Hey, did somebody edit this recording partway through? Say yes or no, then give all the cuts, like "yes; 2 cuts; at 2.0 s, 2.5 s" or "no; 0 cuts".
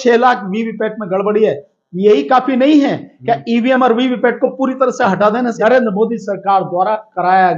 yes; 1 cut; at 5.5 s